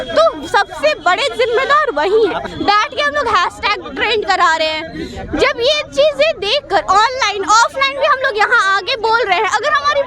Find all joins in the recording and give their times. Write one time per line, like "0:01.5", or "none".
0:02.4